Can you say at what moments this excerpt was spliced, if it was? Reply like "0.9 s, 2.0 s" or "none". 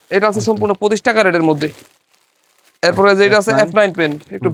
none